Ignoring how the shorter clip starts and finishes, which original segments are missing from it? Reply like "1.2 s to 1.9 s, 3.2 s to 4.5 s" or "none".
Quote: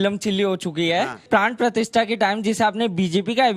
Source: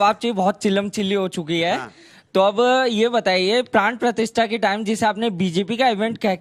2.0 s to 3.7 s